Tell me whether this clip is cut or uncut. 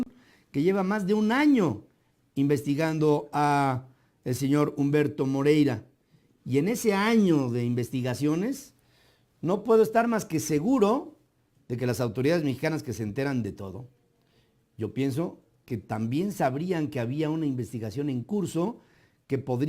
cut